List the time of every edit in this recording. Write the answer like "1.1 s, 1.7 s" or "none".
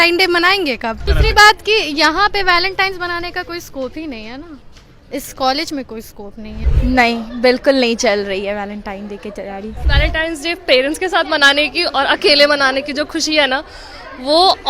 1.1 s, 6.6 s, 9.8 s